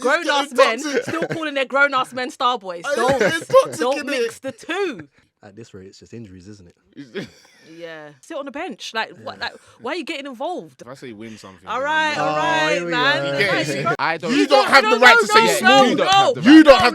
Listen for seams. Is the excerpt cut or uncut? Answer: cut